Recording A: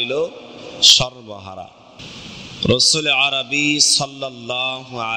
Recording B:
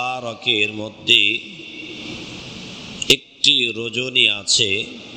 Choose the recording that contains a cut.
A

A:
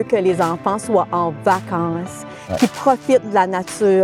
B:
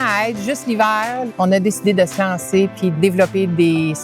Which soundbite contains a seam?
B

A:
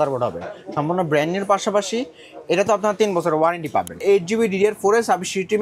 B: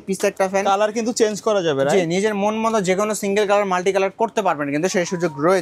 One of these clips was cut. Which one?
A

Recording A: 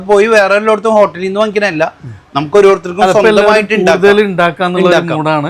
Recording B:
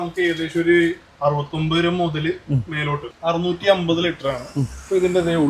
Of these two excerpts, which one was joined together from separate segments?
B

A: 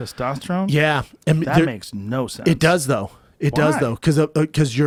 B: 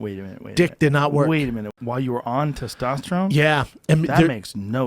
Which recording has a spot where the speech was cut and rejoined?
B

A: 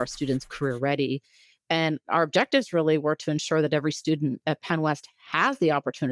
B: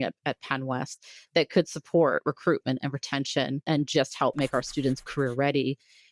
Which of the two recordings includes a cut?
B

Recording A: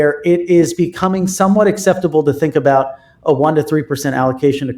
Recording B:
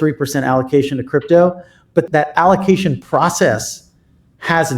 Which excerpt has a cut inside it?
B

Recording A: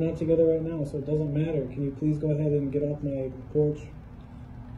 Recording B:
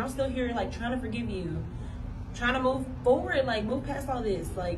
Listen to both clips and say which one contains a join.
A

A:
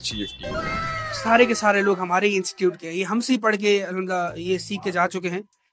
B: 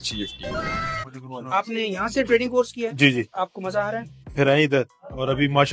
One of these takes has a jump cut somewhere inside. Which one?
B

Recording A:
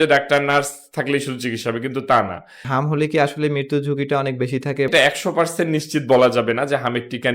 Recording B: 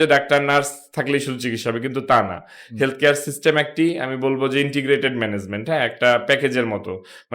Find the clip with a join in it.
A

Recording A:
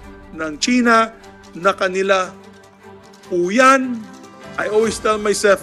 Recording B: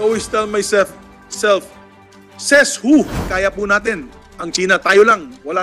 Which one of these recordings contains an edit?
B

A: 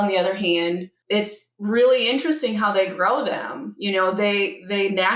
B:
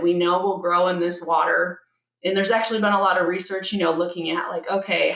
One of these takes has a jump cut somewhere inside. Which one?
A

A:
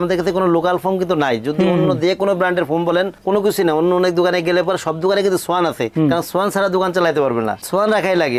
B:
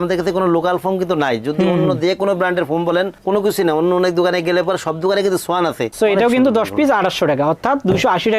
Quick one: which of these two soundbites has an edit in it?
B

